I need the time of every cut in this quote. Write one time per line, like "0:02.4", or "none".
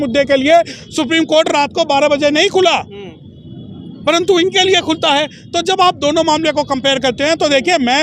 none